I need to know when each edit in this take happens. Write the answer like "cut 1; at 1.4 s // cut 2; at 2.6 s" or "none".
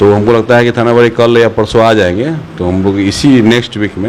none